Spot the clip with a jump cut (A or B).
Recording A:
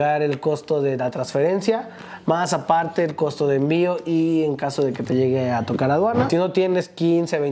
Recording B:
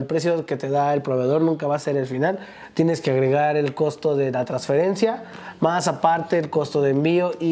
A